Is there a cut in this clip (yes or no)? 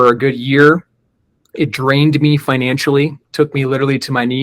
yes